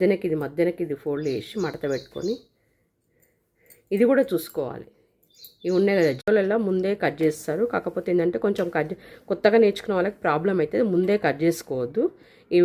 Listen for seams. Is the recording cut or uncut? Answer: cut